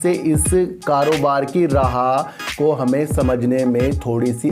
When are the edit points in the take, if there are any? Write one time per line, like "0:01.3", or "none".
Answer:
none